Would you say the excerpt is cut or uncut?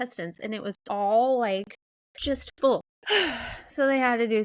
uncut